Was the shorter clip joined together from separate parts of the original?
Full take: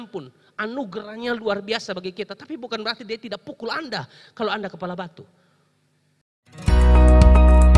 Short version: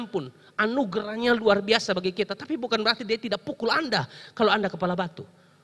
no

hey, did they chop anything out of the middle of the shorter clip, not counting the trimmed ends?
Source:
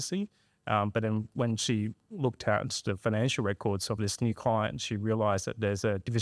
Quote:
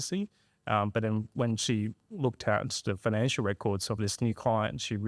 no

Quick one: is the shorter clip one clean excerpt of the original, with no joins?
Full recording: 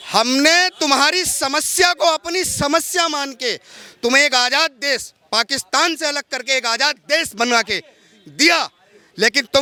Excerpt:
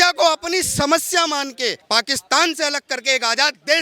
no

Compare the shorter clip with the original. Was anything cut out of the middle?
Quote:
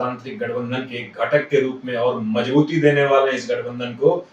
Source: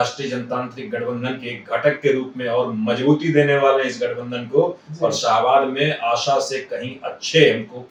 no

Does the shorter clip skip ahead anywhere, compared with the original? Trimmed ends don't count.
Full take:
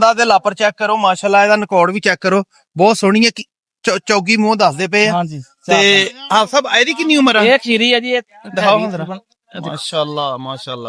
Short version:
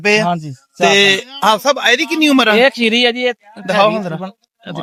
no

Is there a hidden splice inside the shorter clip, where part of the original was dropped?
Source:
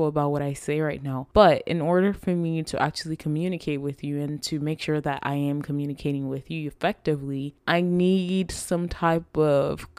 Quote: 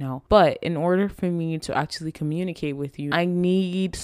yes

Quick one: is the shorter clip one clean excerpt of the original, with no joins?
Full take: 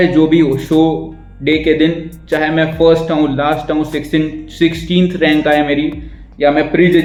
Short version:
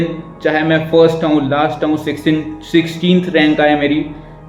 yes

